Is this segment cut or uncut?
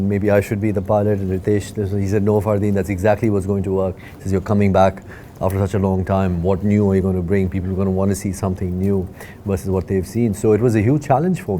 uncut